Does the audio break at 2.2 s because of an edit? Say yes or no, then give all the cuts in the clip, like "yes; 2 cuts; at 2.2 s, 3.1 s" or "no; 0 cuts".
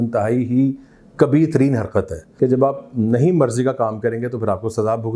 yes; 1 cut; at 2.2 s